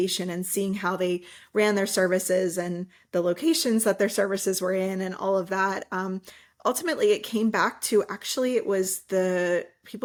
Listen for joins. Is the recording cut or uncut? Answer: uncut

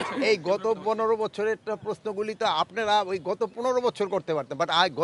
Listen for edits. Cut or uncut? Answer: uncut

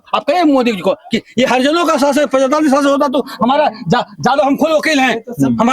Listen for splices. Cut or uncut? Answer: uncut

